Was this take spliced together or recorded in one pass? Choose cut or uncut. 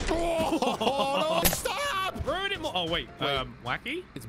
cut